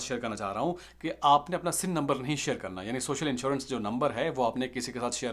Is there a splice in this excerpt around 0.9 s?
no; 0 cuts

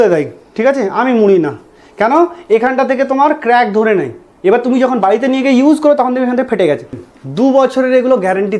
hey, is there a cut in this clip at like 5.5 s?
no; 1 cut; at 7.1 s

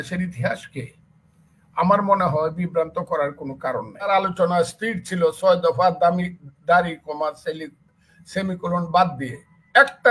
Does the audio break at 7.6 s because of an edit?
no; 1 cut; at 4.1 s

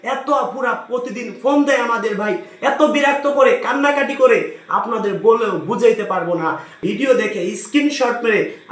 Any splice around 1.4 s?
no; 1 cut; at 6.8 s

